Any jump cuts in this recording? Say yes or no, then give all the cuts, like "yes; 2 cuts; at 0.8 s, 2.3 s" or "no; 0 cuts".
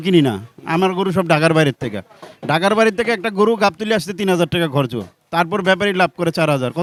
no; 0 cuts